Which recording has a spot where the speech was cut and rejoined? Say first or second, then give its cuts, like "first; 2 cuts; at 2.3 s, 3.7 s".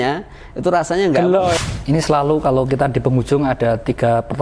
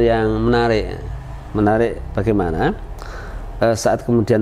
first; 1 cut; at 1.6 s